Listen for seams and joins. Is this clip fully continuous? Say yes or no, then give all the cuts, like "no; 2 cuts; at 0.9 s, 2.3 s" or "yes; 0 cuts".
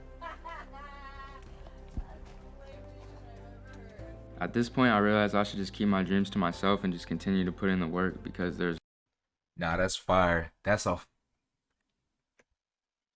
yes; 0 cuts